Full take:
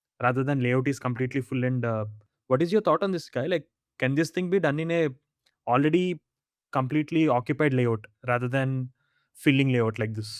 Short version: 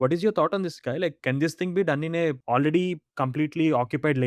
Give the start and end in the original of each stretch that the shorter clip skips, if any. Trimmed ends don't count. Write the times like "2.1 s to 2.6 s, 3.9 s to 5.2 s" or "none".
3.7 s to 3.9 s, 5.2 s to 5.6 s, 6.2 s to 6.6 s